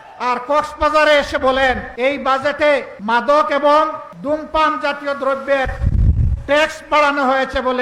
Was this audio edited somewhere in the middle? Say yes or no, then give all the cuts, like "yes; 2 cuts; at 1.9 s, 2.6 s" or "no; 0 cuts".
yes; 3 cuts; at 1.9 s, 2.9 s, 4.1 s